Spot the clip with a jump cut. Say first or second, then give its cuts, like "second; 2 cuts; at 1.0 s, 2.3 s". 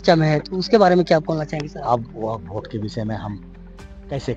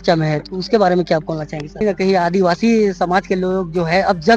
second; 1 cut; at 1.8 s